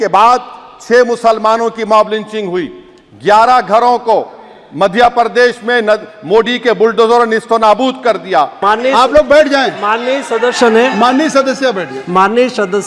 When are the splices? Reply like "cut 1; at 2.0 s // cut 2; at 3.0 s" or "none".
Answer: cut 1; at 8.6 s